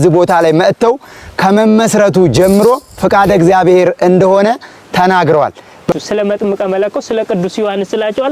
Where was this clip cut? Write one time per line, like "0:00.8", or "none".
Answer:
0:05.9